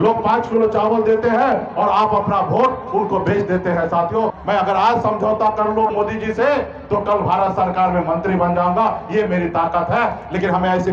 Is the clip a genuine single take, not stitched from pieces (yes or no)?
no